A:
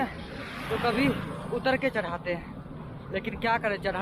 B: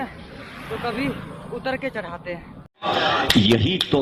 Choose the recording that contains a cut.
A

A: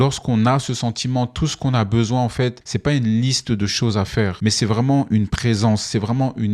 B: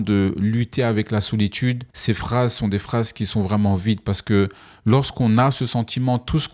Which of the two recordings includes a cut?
A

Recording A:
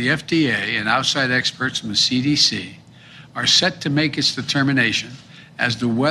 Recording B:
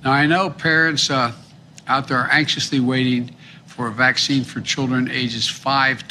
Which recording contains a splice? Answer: A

